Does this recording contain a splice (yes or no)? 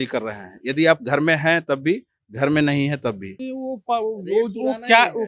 yes